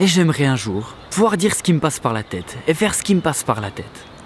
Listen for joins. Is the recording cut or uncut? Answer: cut